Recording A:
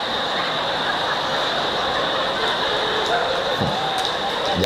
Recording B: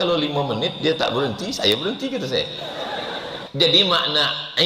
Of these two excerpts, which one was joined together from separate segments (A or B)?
B